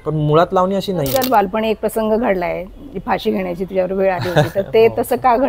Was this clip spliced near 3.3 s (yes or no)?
no